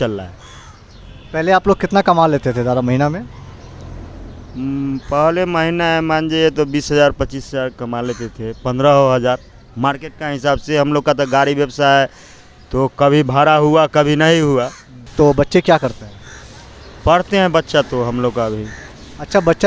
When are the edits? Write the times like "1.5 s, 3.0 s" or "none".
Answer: 15.0 s